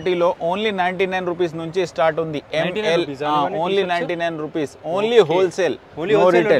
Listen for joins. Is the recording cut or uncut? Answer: uncut